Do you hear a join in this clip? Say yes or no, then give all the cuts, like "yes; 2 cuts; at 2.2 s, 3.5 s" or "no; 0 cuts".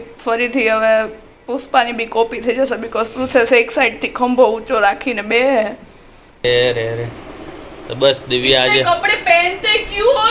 yes; 1 cut; at 6.4 s